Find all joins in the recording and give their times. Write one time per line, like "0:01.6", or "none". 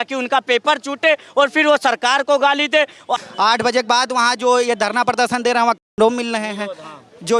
0:03.2

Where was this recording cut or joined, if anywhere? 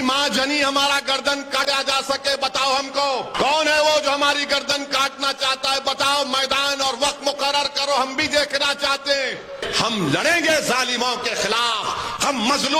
0:01.6
0:03.3
0:09.7

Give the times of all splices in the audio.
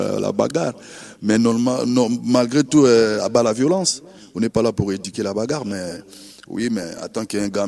none

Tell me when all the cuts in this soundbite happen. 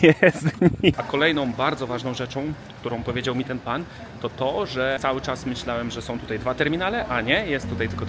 0:01.0
0:05.0

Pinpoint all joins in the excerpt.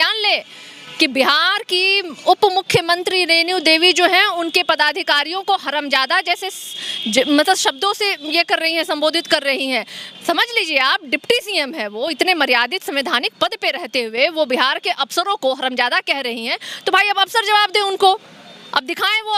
none

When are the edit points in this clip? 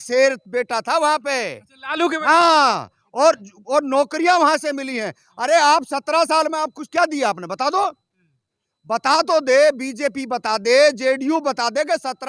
none

